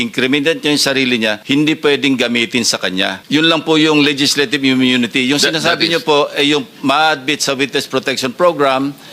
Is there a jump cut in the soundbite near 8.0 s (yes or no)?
no